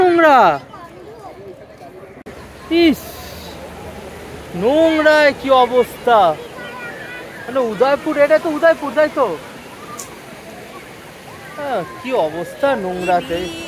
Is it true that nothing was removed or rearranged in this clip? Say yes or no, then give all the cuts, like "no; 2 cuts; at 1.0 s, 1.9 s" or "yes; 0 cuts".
no; 1 cut; at 2.2 s